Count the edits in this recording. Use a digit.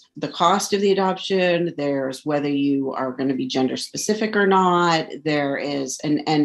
0